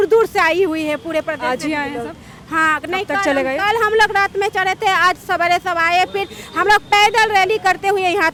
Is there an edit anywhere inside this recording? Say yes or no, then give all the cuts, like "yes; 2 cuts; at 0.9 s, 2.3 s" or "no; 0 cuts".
no; 0 cuts